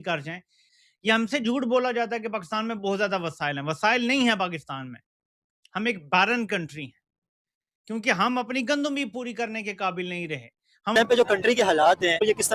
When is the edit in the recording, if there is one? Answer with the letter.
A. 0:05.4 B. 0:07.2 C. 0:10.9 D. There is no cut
C